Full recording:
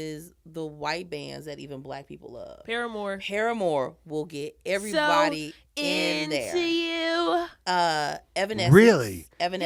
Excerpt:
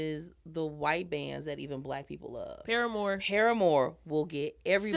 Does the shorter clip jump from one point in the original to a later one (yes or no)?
no